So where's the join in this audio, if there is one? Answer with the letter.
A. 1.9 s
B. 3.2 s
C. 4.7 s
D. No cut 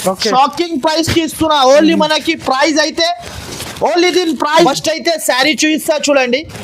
C